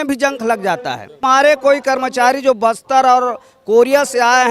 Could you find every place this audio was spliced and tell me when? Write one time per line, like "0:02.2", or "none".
0:01.2